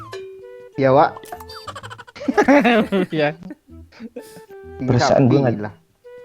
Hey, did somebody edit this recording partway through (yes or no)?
yes